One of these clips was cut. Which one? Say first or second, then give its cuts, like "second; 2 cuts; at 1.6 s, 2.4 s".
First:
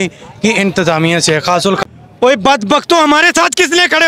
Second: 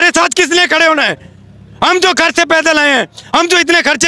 first; 1 cut; at 1.8 s